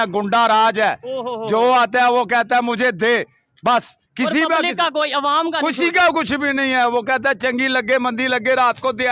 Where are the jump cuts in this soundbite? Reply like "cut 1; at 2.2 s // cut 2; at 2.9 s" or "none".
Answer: none